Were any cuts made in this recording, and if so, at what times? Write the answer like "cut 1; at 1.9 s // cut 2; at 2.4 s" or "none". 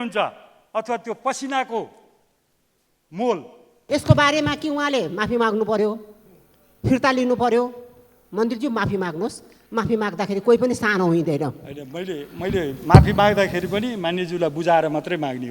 cut 1; at 3.8 s